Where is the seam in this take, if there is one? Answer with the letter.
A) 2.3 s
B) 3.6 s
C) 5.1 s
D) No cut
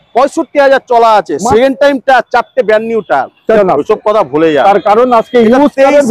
B